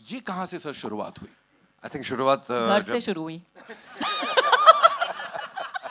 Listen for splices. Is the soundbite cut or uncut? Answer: uncut